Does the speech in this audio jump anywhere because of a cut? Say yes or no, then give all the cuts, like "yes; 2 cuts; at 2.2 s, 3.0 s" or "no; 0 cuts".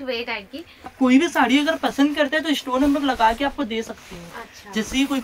yes; 1 cut; at 0.9 s